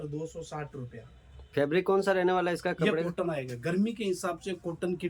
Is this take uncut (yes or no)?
yes